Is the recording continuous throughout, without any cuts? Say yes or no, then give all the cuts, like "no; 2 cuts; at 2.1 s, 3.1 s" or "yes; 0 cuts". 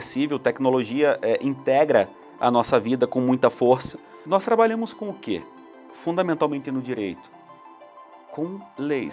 no; 1 cut; at 4.2 s